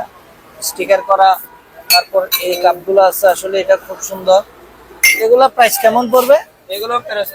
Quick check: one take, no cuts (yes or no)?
yes